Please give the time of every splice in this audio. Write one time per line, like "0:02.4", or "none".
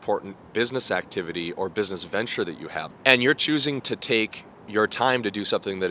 0:02.9

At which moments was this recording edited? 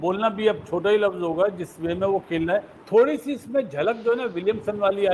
0:02.8

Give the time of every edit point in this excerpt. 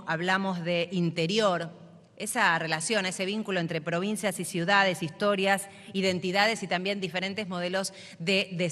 none

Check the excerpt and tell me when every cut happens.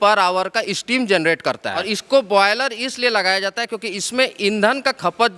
0:01.8

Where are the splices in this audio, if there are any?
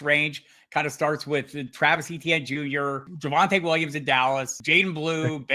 0:03.1
0:04.6

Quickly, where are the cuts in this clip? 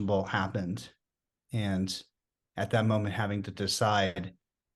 none

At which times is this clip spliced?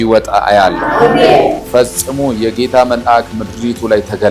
none

